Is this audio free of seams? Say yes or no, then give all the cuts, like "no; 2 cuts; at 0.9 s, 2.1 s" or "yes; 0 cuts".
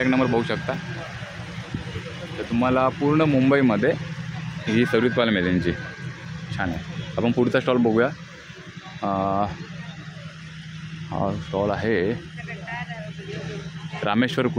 yes; 0 cuts